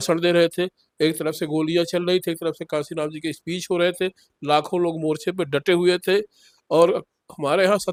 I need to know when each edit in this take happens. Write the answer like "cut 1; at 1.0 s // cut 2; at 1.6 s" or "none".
none